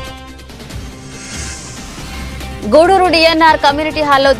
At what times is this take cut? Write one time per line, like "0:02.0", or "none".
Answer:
0:02.6